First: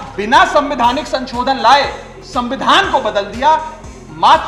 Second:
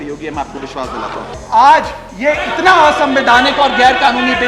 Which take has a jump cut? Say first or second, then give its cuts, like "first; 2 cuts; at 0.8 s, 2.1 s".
second; 1 cut; at 1.3 s